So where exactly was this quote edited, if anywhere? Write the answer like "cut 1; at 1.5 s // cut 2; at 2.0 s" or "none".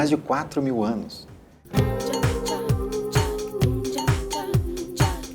cut 1; at 1.6 s